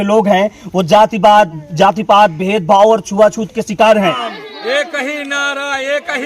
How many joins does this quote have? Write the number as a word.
one